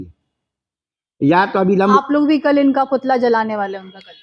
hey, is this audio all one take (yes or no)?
no